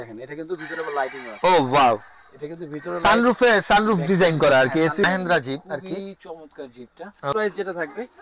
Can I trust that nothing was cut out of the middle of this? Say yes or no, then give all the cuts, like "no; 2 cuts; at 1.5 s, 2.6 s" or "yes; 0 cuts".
no; 2 cuts; at 5.0 s, 7.3 s